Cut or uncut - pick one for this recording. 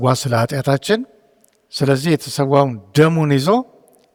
uncut